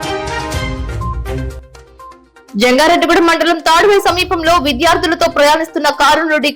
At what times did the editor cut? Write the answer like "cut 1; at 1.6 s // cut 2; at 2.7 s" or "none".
cut 1; at 2.1 s